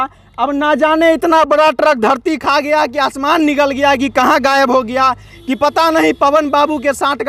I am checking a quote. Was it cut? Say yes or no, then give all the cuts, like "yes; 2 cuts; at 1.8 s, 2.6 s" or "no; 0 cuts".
no; 0 cuts